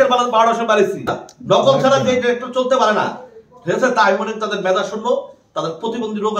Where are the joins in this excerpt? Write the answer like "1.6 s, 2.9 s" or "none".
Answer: 1.2 s